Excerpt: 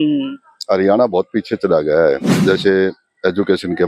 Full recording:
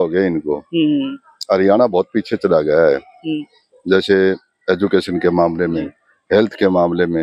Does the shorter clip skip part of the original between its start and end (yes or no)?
yes